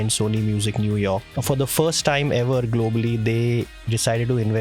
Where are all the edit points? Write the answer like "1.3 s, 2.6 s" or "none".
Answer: 1.4 s